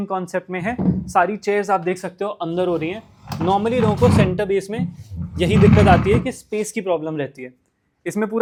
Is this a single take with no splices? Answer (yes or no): yes